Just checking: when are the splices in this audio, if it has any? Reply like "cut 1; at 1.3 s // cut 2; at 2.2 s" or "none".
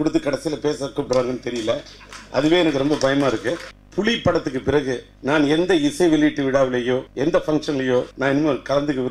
cut 1; at 3.8 s // cut 2; at 5.1 s // cut 3; at 7.1 s // cut 4; at 8.1 s